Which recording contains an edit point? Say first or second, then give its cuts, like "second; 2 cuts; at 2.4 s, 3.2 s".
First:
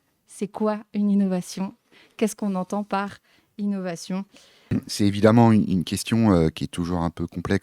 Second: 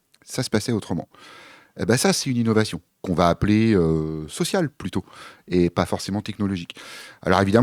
first; 1 cut; at 4.8 s